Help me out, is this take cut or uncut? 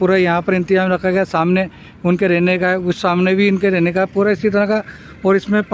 uncut